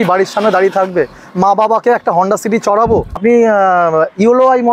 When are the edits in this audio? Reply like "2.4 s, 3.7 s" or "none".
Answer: 3.2 s